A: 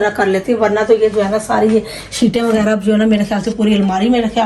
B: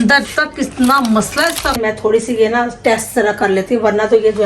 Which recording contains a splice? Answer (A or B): B